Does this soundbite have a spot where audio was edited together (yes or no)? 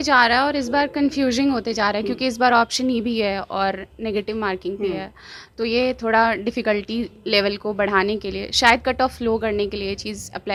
no